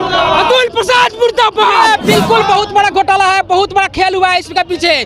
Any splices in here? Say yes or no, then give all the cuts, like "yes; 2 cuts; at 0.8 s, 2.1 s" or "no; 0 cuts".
yes; 1 cut; at 1.8 s